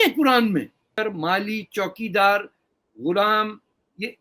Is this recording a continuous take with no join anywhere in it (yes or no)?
no